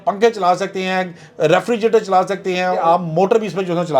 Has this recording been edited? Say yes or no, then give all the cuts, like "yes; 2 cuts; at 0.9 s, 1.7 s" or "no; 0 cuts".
yes; 1 cut; at 2.8 s